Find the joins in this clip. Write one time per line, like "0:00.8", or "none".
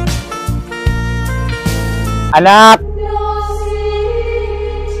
none